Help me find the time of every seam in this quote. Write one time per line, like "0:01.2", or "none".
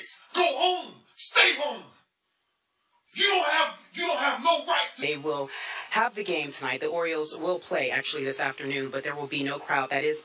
none

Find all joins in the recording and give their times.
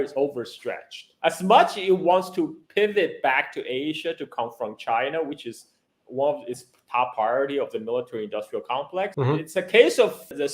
0:01.1

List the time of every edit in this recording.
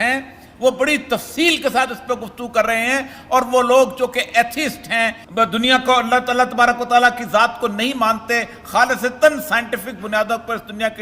0:05.2

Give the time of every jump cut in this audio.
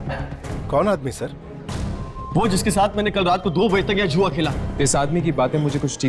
0:04.6

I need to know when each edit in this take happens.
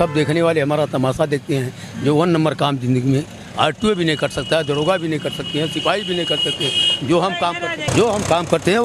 0:07.9

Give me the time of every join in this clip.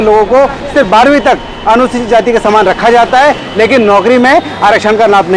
none

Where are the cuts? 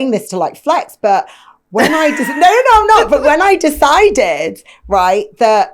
none

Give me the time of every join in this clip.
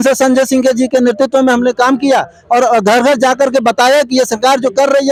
none

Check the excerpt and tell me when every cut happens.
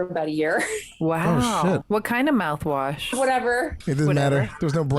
0:01.8
0:03.8

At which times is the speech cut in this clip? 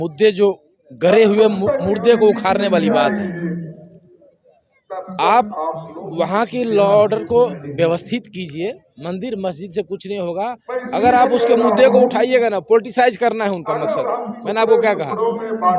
none

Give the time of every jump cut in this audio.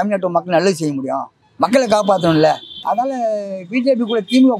0:02.7

